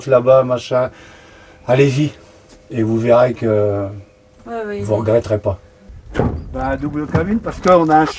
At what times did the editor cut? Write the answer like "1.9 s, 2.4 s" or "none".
5.8 s